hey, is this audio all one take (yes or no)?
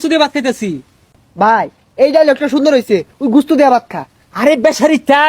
yes